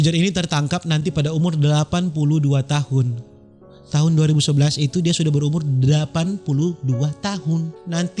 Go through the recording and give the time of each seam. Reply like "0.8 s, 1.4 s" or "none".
none